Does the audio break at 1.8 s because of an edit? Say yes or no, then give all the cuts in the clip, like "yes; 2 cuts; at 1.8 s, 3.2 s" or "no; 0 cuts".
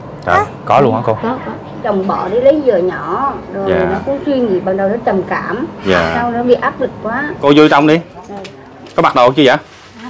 yes; 2 cuts; at 1.8 s, 7.3 s